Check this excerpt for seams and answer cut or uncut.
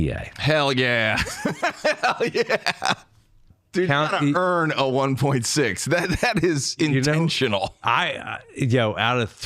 cut